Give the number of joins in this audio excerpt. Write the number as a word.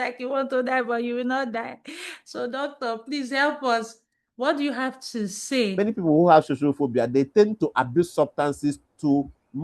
one